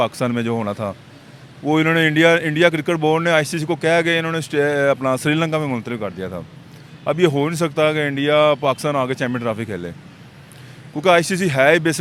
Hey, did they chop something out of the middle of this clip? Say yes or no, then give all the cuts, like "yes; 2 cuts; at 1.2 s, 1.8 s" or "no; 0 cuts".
no; 0 cuts